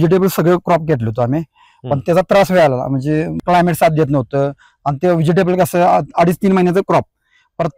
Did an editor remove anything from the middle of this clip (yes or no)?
yes